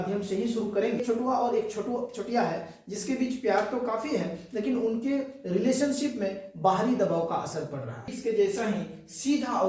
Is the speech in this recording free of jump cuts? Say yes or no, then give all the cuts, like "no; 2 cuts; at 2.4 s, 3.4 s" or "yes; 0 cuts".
no; 2 cuts; at 1.0 s, 8.2 s